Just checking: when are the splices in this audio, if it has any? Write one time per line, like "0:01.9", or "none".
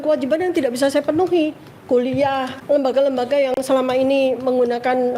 0:02.5